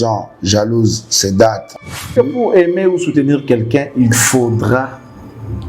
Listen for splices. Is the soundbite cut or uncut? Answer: cut